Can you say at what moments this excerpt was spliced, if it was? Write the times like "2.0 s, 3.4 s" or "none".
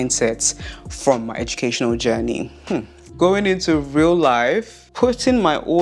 3.0 s, 4.8 s